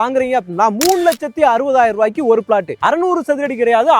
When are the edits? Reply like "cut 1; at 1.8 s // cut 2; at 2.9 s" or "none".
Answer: cut 1; at 2.8 s

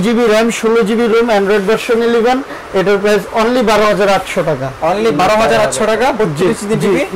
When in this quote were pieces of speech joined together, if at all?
none

